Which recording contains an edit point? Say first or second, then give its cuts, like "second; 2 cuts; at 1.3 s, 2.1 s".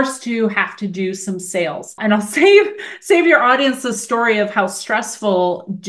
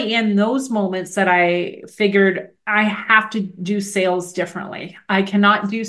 first; 1 cut; at 2.0 s